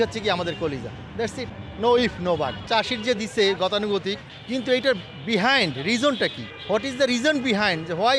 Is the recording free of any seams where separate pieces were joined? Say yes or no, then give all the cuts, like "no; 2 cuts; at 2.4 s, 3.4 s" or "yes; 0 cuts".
no; 2 cuts; at 1.6 s, 2.6 s